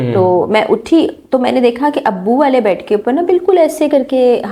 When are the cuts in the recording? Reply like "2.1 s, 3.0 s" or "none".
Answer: none